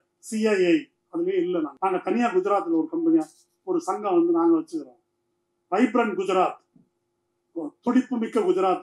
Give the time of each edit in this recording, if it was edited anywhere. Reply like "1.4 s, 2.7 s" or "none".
1.7 s